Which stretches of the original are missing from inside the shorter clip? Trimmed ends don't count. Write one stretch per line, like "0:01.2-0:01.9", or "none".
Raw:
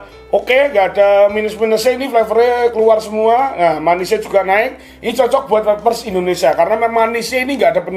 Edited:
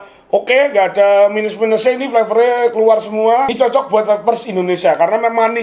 0:03.5-0:05.1